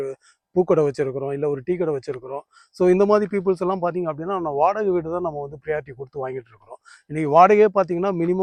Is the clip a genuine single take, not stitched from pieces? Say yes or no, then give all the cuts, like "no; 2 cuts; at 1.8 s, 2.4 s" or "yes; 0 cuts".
yes; 0 cuts